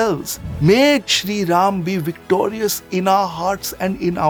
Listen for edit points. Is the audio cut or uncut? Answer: uncut